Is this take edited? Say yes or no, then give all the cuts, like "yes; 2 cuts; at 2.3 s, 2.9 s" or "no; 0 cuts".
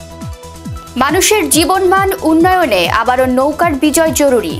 yes; 1 cut; at 1.0 s